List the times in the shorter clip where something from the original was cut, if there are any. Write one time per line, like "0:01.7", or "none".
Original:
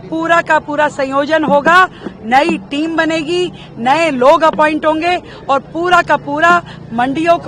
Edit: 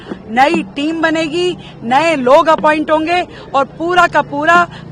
none